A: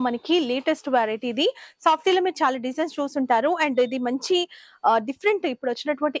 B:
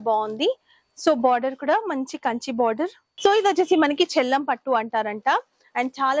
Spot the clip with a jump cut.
B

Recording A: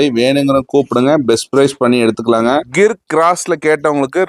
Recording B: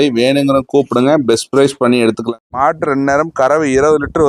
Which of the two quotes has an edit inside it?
B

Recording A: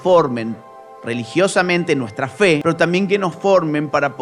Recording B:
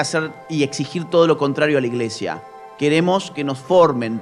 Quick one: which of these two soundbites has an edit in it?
A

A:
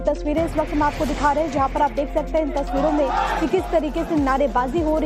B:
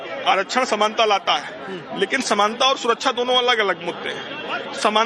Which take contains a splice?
A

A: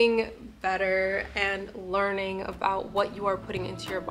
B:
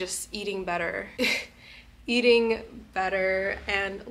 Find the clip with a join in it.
B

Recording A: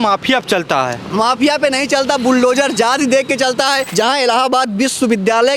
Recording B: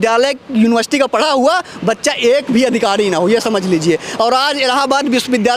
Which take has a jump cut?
A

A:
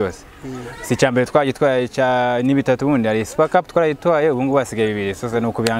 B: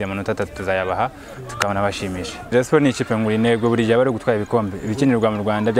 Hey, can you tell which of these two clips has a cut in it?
B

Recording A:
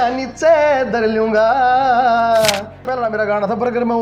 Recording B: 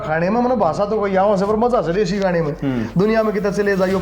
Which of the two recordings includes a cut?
A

